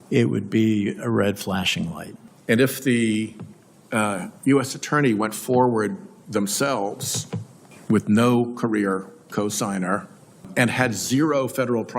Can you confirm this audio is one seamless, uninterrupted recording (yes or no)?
no